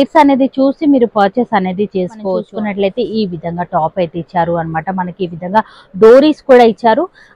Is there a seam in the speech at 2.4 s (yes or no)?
yes